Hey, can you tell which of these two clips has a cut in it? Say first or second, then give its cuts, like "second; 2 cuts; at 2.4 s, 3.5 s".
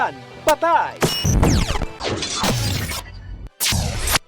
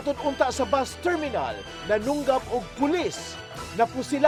first; 2 cuts; at 0.9 s, 2.0 s